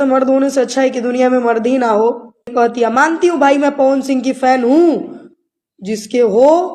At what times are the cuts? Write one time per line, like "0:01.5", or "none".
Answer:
0:02.5

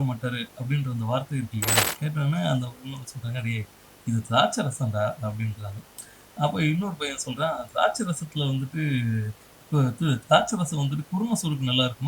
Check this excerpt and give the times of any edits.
0:01.9

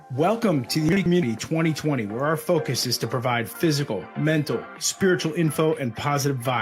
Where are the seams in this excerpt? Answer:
0:01.0

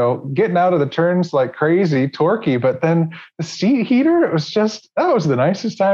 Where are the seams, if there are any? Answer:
none

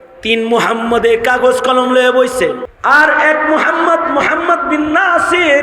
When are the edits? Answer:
0:02.7

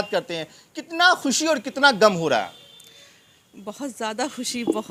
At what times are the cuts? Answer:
none

